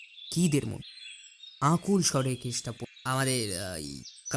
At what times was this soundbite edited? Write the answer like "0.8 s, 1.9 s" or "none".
2.9 s